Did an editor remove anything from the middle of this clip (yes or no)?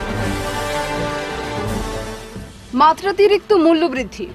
no